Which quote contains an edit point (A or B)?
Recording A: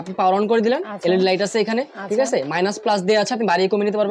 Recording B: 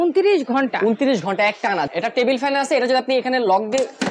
B